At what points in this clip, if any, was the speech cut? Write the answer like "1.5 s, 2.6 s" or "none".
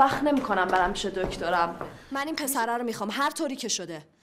2.1 s